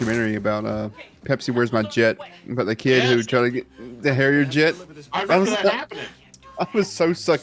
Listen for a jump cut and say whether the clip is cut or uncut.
uncut